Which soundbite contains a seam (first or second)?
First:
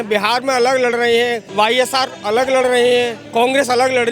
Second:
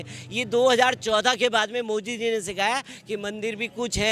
first